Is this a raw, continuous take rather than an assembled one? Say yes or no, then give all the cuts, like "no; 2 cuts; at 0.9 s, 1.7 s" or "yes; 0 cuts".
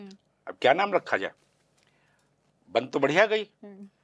yes; 0 cuts